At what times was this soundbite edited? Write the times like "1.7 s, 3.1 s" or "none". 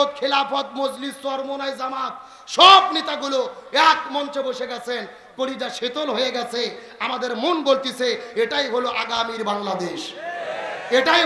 none